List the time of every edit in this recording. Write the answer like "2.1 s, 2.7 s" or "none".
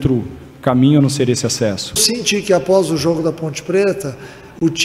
2.0 s